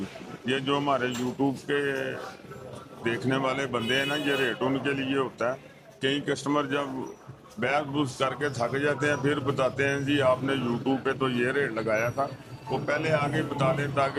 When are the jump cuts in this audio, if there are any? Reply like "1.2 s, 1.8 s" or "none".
none

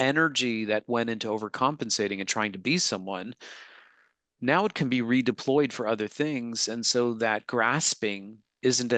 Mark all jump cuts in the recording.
none

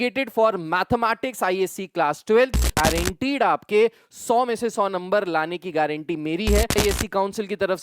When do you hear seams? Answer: 2.8 s, 6.8 s

